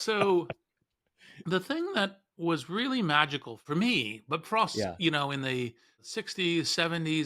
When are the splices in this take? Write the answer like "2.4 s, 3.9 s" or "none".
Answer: 3.5 s, 6.1 s